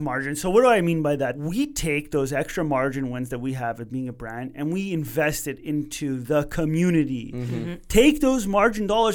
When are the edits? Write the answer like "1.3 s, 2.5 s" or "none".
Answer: 1.4 s